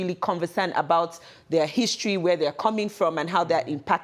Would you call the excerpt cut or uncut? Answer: uncut